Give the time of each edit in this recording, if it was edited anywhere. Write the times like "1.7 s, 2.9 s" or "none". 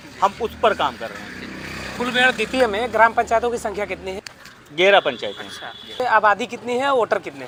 none